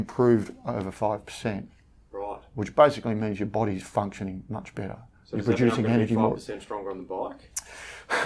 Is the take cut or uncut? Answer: uncut